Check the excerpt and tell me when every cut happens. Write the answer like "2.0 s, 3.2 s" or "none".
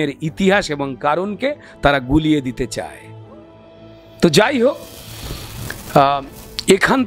none